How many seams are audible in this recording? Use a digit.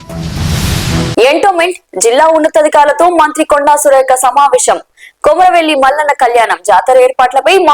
1